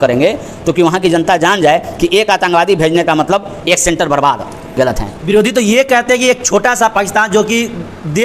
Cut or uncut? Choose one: cut